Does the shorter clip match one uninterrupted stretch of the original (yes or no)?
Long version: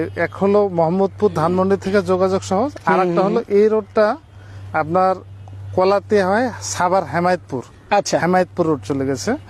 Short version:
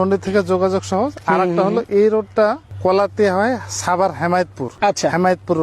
no